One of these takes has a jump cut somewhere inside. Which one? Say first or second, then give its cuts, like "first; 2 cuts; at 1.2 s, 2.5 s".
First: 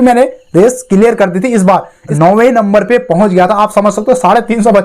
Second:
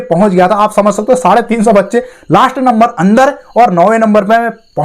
first; 1 cut; at 2.0 s